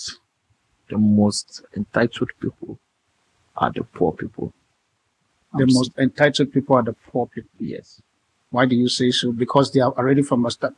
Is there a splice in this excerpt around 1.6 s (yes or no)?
no